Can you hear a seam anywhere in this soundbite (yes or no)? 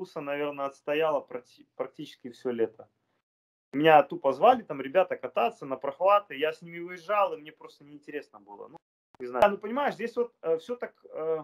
yes